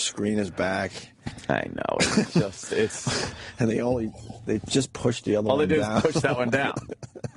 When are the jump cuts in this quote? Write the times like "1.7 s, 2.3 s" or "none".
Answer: 3.7 s